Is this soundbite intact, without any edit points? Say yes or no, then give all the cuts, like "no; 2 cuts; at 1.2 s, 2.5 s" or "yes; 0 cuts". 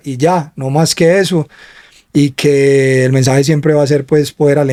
yes; 0 cuts